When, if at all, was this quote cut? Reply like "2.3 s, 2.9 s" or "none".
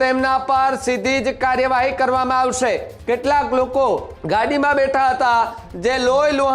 2.9 s, 4.1 s